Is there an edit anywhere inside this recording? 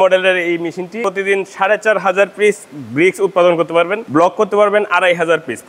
yes; 2 cuts; at 1.0 s, 4.0 s

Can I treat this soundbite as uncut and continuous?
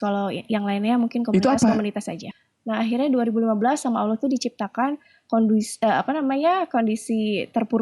no; 1 cut; at 2.1 s

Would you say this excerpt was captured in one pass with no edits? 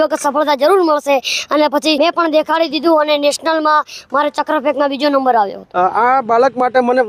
no; 2 cuts; at 2.0 s, 5.6 s

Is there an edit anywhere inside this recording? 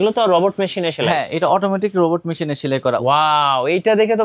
yes; 1 cut; at 3.0 s

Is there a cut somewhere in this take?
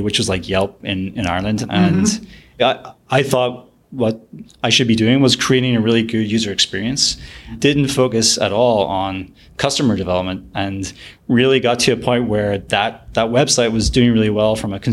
yes; 3 cuts; at 1.6 s, 2.6 s, 7.5 s

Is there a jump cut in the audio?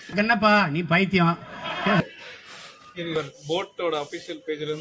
yes; 1 cut; at 3.1 s

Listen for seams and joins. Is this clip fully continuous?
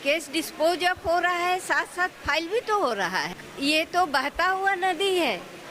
no; 1 cut; at 3.3 s

